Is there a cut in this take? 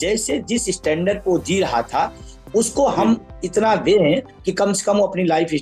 no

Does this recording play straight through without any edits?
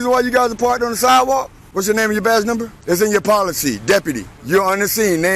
no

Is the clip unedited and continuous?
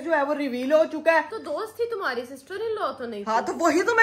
no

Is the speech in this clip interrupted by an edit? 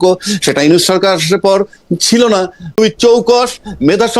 yes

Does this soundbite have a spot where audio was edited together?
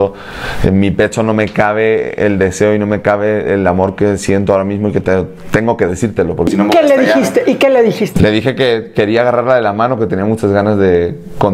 no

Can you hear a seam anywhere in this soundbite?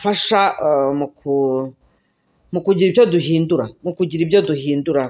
no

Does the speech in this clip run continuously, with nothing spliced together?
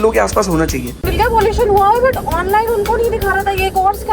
no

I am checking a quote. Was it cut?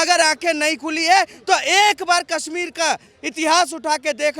no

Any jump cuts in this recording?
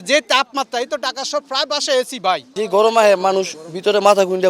yes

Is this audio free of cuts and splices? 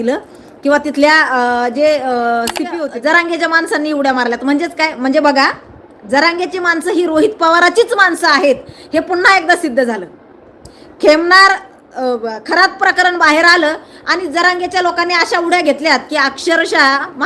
no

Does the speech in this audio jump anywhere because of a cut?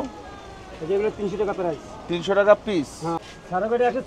yes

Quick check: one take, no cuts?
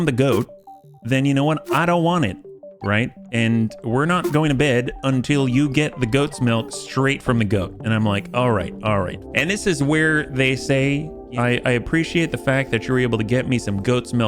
no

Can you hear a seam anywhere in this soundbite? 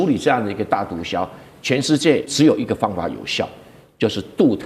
yes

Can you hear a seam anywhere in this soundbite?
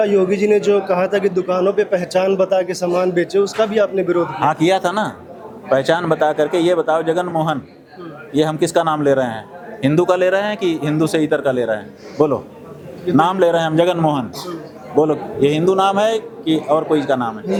no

